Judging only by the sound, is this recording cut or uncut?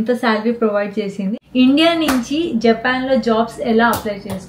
cut